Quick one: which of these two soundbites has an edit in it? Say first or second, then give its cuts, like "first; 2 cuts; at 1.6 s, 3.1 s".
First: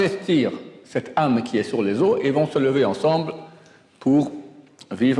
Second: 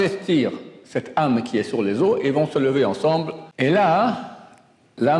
second; 1 cut; at 3.4 s